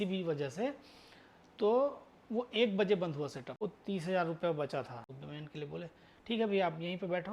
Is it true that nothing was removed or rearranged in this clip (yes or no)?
no